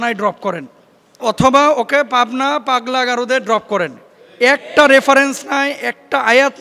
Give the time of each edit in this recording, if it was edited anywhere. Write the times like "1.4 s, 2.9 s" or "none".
1.2 s